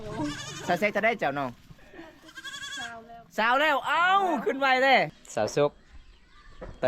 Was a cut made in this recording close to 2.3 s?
no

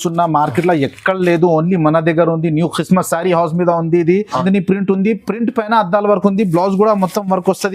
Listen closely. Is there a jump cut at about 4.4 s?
yes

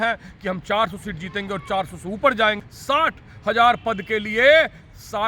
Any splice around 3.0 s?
yes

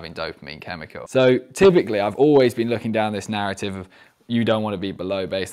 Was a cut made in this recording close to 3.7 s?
no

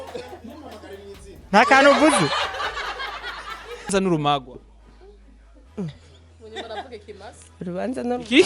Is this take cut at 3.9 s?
yes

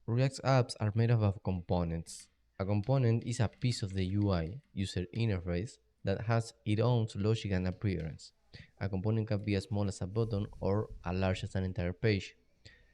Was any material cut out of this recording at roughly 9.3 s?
no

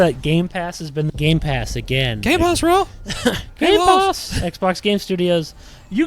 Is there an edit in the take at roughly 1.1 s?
yes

